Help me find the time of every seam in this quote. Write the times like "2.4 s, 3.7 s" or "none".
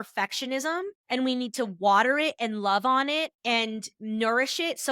1.0 s